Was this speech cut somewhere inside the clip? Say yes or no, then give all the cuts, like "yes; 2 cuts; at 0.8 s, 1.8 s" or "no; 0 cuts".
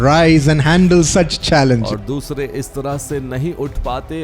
yes; 1 cut; at 1.8 s